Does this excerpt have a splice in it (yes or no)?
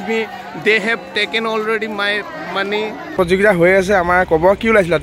yes